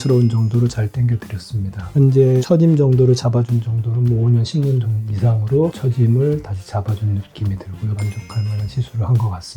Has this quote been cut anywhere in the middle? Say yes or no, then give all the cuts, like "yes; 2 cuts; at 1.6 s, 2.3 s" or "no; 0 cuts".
yes; 2 cuts; at 1.9 s, 8.0 s